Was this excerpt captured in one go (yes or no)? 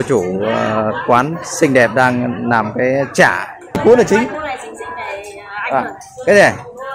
no